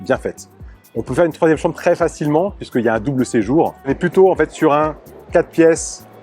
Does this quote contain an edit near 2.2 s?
no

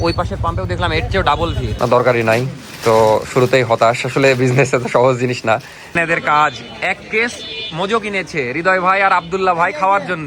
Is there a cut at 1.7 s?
yes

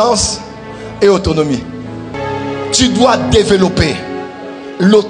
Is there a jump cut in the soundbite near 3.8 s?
no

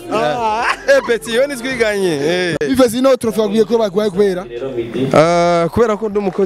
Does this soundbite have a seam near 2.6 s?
yes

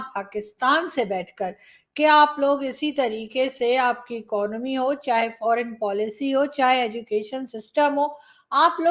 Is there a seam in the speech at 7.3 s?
no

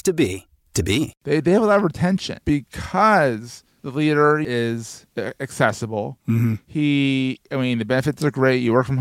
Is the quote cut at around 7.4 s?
no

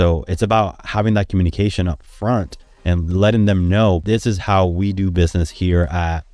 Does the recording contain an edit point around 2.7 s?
yes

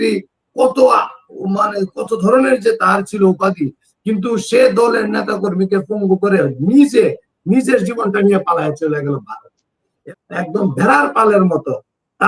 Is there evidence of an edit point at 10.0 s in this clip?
yes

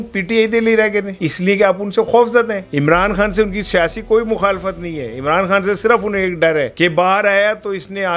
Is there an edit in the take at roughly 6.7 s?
yes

